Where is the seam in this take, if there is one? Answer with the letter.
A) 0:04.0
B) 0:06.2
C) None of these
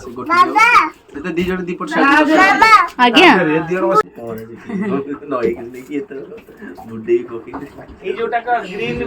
A